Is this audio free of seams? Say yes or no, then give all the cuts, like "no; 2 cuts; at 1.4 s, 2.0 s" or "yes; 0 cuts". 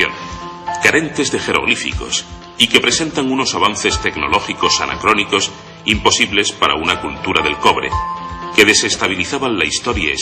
yes; 0 cuts